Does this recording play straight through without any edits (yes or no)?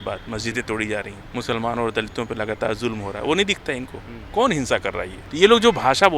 no